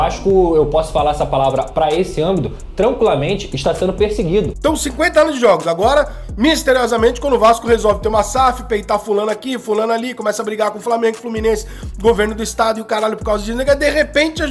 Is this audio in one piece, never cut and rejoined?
no; 1 cut; at 4.5 s

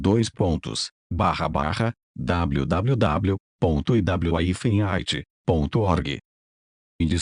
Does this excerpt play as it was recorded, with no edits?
no; 1 cut; at 2.0 s

